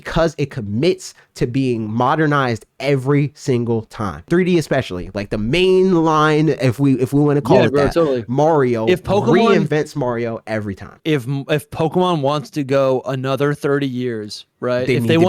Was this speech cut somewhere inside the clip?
yes; 2 cuts; at 4.3 s, 11.0 s

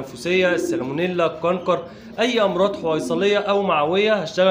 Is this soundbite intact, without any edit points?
yes; 0 cuts

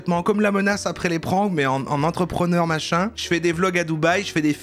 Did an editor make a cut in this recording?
no; 0 cuts

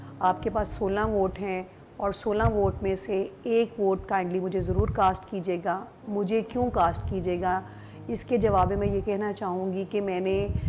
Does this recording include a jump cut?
no; 0 cuts

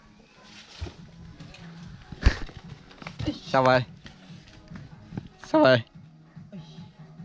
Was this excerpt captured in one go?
yes; 0 cuts

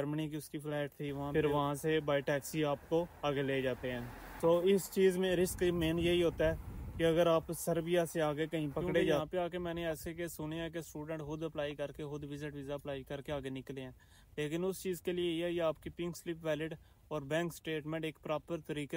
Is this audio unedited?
no; 2 cuts; at 1.3 s, 9.2 s

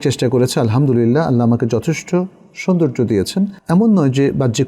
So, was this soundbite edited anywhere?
yes; 1 cut; at 3.6 s

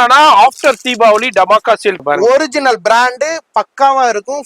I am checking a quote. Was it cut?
yes; 1 cut; at 2.0 s

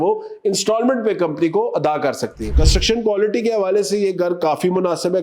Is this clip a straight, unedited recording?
no; 1 cut; at 2.5 s

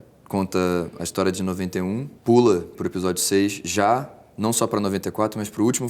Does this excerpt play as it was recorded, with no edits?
no; 1 cut; at 2.1 s

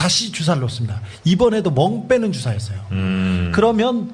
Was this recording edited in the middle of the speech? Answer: yes; 1 cut; at 2.0 s

